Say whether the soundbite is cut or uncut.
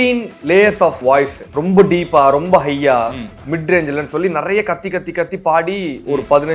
cut